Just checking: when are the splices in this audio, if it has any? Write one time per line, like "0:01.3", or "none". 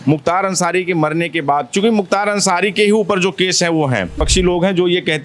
0:04.2